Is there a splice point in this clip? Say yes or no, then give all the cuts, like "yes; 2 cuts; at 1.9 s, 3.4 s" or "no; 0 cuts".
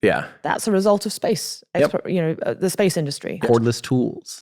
yes; 1 cut; at 3.4 s